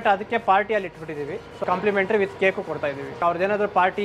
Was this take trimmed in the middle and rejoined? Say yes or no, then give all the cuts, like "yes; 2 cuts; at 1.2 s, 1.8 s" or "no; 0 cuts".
yes; 2 cuts; at 1.6 s, 3.1 s